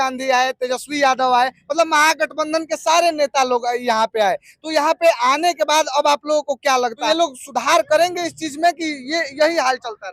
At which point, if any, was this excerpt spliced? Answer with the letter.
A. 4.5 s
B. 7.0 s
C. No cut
B